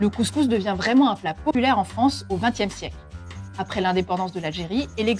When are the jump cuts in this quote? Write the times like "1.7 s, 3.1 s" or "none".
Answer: 1.5 s